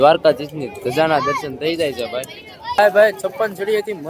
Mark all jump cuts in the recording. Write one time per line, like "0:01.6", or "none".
0:02.6